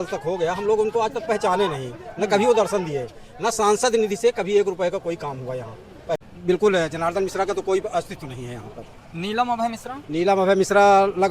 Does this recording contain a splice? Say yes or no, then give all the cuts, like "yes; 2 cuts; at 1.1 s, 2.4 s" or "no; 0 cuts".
yes; 1 cut; at 6.3 s